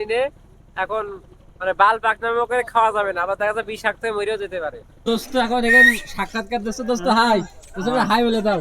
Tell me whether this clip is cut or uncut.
cut